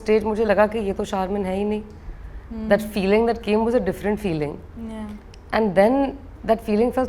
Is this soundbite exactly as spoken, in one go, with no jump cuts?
yes; 0 cuts

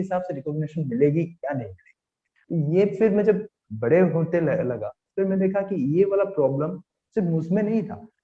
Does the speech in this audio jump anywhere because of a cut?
no; 0 cuts

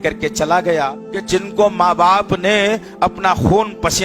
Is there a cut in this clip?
yes; 1 cut; at 1.0 s

